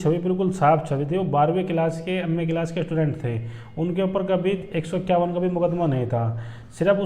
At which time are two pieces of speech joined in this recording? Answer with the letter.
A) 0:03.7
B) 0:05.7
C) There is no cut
C